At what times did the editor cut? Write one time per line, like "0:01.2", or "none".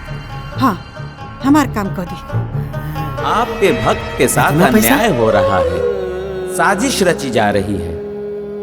0:03.2